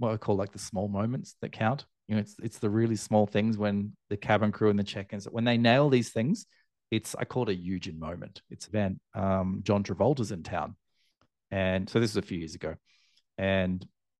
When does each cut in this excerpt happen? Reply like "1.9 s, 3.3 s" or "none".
8.7 s